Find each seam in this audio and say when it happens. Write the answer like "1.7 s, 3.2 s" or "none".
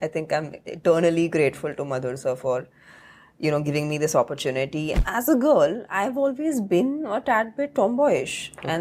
4.9 s